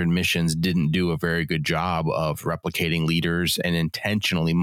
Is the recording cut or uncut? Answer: cut